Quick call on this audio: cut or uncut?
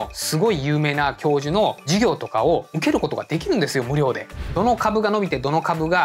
cut